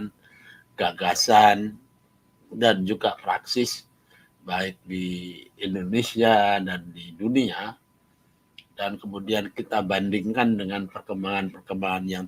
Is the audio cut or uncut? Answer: uncut